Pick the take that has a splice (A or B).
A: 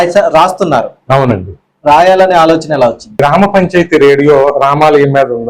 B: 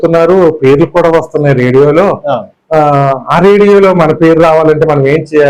A